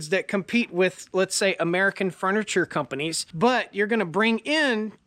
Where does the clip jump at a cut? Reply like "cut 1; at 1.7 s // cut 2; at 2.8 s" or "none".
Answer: cut 1; at 3.2 s